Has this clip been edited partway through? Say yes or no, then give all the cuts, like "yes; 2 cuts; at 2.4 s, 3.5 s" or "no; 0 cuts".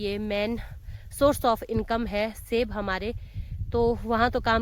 no; 0 cuts